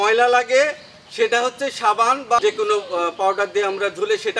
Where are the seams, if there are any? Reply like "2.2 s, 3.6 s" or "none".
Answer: 2.4 s